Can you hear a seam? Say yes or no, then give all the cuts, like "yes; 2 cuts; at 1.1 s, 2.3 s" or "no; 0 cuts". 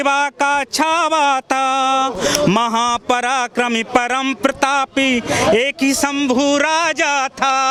no; 0 cuts